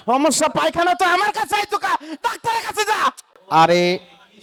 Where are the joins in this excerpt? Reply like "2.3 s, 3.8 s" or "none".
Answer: none